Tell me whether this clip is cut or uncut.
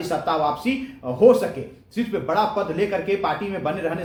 uncut